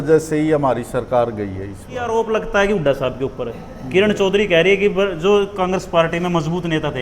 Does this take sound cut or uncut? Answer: cut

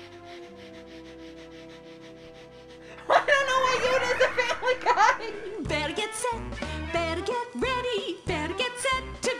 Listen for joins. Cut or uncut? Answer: cut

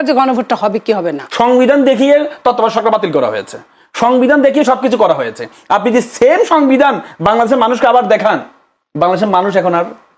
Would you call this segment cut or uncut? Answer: cut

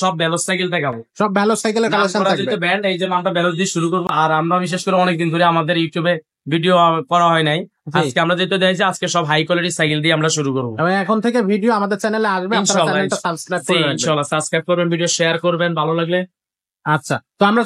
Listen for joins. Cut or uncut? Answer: uncut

